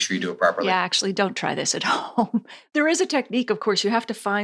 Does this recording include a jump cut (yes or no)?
yes